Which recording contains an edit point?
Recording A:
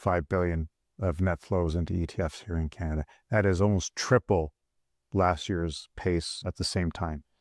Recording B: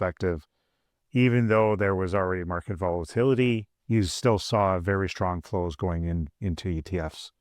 B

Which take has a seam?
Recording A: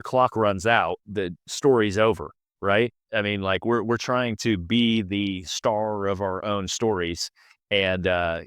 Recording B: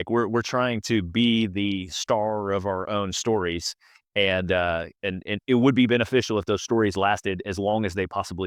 A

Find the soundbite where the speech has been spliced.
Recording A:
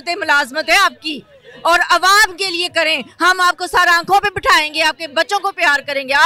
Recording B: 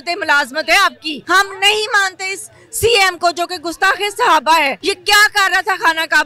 B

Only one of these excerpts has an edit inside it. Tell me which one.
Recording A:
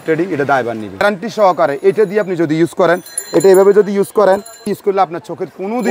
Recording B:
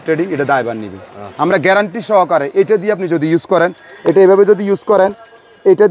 A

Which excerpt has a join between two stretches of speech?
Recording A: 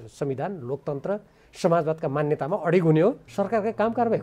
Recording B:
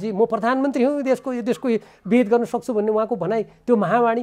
A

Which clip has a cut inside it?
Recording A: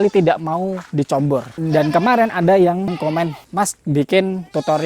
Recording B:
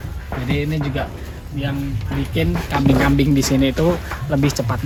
A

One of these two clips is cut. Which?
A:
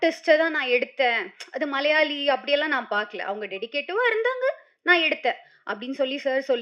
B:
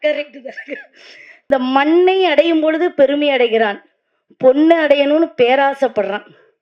B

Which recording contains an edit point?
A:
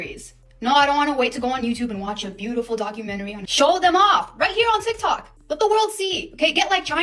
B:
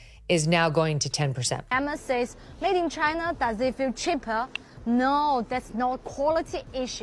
B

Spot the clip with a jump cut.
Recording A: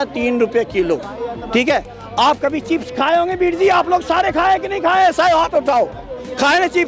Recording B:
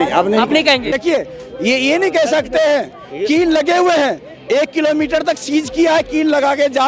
B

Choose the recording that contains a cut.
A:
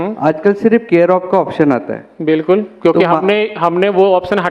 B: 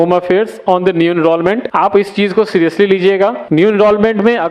B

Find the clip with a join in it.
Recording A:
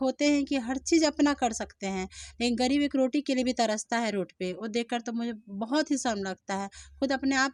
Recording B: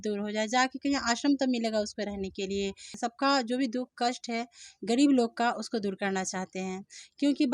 B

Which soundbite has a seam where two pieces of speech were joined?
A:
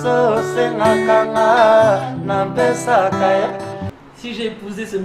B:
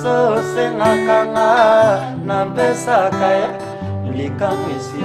A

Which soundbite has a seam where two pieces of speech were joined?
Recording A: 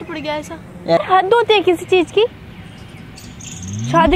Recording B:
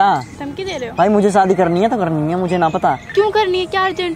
A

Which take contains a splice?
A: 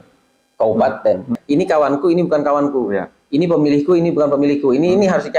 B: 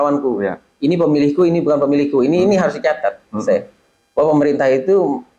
A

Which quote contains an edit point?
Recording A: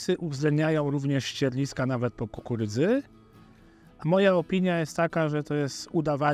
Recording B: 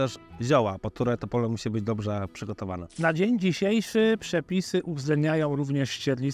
B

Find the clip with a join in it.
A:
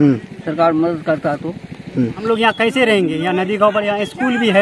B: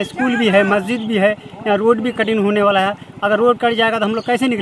A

